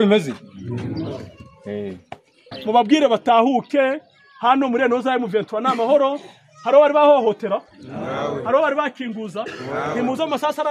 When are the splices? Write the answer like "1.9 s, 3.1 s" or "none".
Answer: 2.5 s